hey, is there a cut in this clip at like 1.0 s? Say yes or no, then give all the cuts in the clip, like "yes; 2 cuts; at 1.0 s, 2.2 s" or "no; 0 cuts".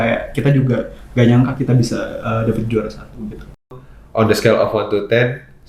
no; 1 cut; at 3.8 s